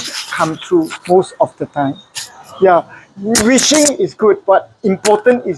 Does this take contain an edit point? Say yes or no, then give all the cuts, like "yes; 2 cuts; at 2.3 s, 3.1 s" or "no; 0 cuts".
no; 0 cuts